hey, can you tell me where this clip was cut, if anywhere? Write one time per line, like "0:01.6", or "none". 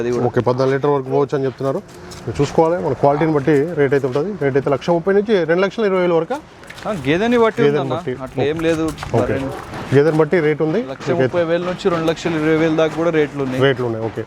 none